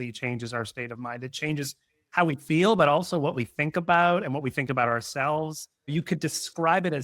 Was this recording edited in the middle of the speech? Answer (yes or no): yes